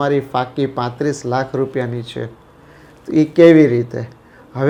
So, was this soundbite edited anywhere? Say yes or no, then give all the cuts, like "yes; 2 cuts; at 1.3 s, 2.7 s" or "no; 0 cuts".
no; 0 cuts